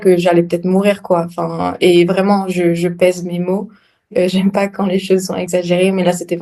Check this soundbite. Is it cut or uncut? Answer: cut